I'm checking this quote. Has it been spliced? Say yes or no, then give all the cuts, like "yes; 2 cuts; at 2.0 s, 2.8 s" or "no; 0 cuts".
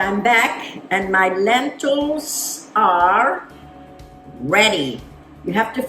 no; 0 cuts